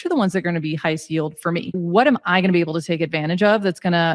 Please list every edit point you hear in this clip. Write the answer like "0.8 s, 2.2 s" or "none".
1.8 s